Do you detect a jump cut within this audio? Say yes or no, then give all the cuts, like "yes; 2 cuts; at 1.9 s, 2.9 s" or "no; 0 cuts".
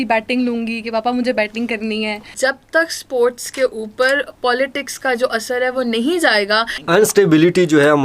yes; 2 cuts; at 2.3 s, 6.8 s